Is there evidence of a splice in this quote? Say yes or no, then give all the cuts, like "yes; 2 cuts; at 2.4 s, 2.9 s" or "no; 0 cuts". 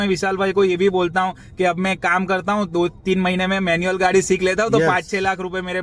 no; 0 cuts